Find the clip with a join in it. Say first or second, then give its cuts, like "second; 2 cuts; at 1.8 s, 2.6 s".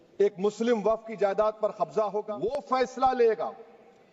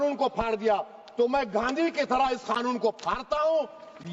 first; 1 cut; at 2.4 s